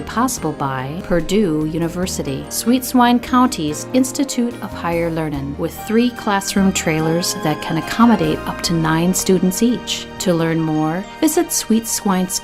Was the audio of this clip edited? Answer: no; 0 cuts

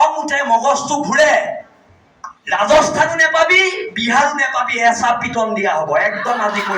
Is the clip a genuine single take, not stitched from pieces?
yes; 0 cuts

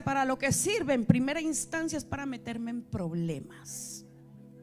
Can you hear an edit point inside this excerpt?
no; 0 cuts

